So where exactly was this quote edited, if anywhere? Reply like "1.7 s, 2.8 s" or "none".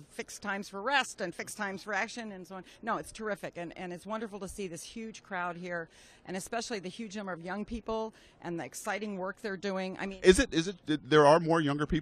8.4 s